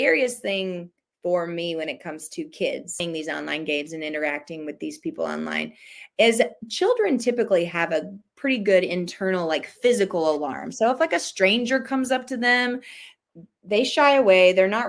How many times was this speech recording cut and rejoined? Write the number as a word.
one